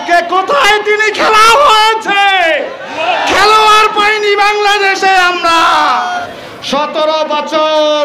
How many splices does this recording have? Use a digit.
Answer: 1